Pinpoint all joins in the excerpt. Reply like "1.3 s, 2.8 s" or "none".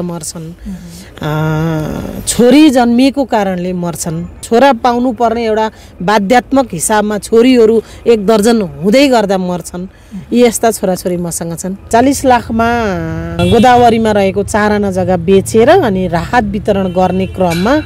4.4 s, 11.9 s, 13.3 s

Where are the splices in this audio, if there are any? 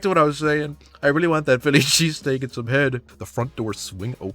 3.2 s

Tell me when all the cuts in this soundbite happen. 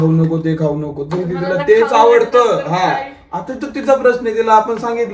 none

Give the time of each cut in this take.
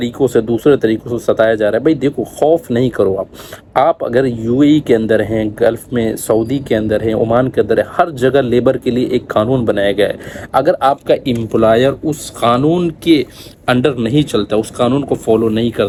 none

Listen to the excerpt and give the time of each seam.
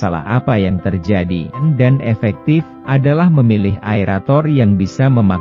1.6 s

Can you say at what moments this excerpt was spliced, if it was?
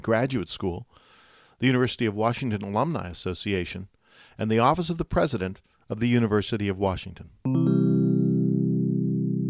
7.6 s

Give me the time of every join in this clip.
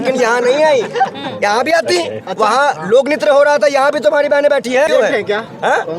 4.9 s

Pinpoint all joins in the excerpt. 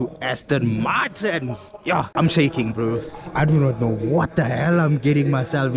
2.1 s

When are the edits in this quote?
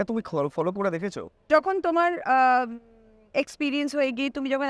1.5 s

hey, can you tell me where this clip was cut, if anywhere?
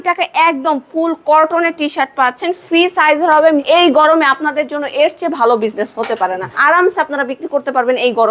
3.6 s, 6.6 s

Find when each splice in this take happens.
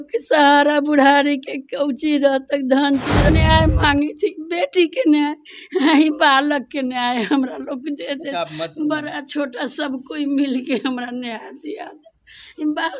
3.3 s

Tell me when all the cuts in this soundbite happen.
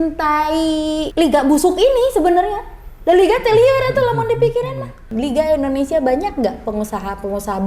1.1 s, 5.1 s

